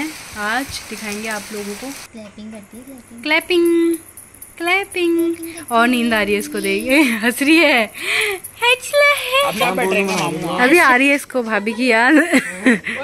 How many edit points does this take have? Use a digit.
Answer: 2